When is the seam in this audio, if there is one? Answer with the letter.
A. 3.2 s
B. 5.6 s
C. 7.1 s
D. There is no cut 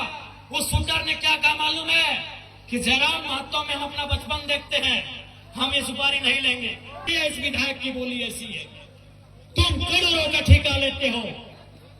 C